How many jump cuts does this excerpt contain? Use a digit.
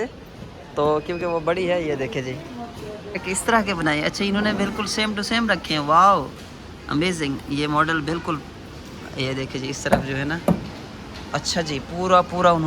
1